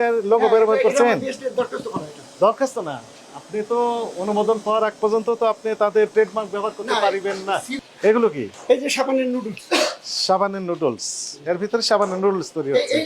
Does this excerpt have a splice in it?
yes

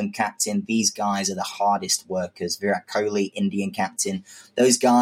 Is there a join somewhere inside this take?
no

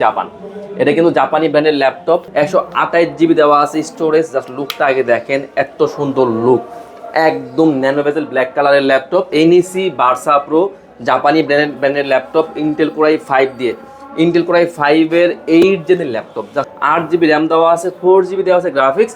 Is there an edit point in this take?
yes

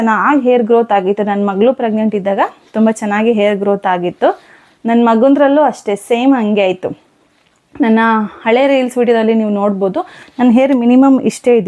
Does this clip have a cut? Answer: no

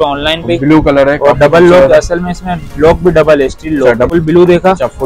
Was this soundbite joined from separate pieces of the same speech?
yes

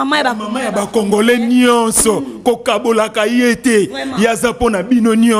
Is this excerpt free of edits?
yes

